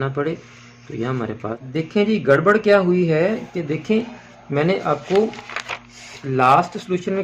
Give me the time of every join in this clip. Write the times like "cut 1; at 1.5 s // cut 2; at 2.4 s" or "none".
cut 1; at 1.5 s